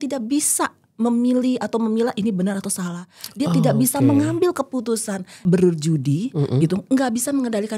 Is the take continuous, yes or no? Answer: no